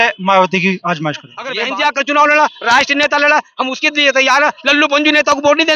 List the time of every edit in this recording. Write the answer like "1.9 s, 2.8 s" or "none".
1.6 s